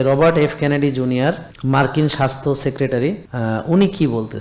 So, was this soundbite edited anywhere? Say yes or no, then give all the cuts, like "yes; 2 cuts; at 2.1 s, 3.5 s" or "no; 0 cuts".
yes; 2 cuts; at 1.5 s, 3.3 s